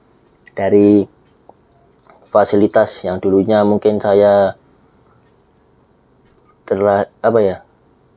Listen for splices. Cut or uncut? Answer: uncut